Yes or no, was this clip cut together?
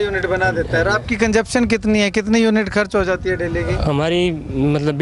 no